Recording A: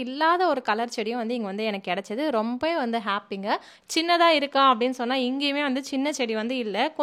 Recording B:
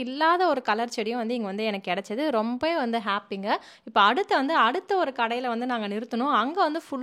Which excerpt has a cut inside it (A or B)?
A